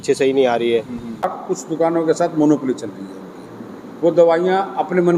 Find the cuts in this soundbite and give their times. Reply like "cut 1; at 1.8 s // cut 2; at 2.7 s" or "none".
cut 1; at 1.3 s